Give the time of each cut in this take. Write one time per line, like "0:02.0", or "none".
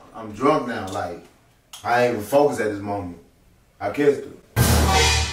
0:04.4